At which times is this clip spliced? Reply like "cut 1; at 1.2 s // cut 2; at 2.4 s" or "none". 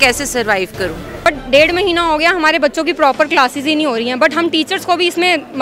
cut 1; at 1.3 s